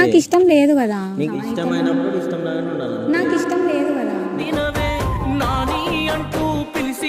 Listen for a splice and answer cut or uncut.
uncut